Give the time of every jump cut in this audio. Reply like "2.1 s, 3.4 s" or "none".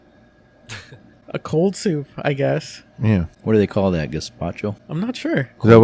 1.2 s, 3.3 s, 4.8 s